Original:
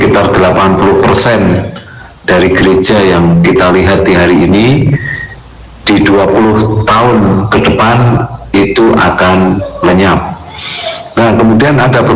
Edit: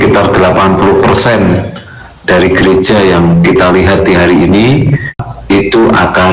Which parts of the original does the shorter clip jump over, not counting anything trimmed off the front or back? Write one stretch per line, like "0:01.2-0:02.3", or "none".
0:05.3-0:08.3